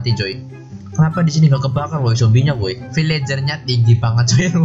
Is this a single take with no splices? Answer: no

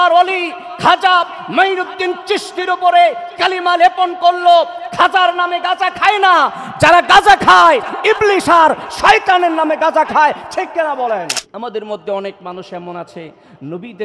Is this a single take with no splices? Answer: no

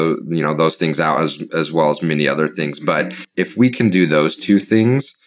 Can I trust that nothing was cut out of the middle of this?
no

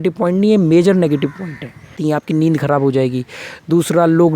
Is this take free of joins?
no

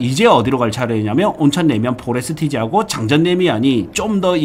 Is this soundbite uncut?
yes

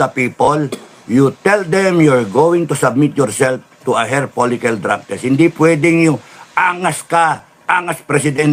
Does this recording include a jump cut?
no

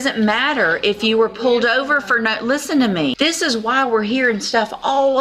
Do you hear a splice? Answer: yes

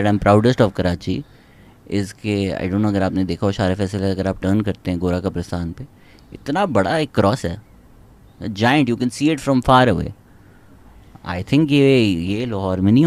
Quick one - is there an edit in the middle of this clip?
no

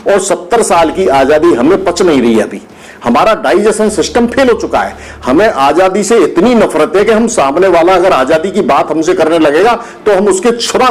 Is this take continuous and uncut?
yes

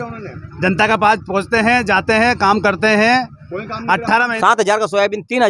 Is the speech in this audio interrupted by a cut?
yes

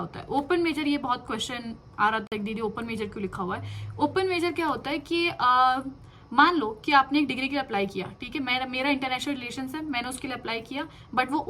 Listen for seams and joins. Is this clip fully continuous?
yes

